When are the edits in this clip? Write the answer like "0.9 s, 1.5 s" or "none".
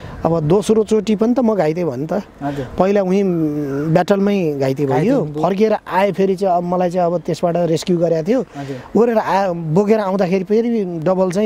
none